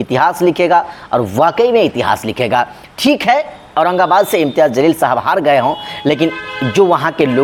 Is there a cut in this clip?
no; 0 cuts

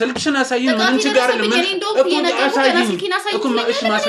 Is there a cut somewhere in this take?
no; 0 cuts

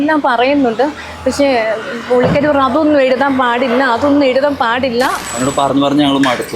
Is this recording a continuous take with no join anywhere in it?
no; 1 cut; at 5.2 s

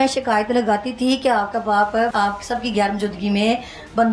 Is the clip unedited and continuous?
no; 1 cut; at 2.1 s

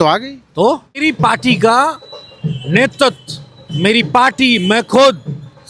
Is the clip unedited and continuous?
no; 1 cut; at 1.0 s

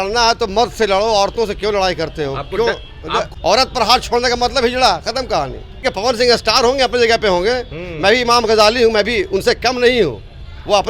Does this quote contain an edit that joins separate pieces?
yes; 2 cuts; at 3.3 s, 5.7 s

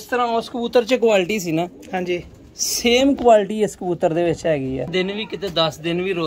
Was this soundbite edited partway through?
yes; 1 cut; at 4.9 s

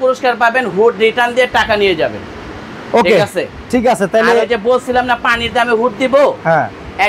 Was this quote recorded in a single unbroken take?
yes; 0 cuts

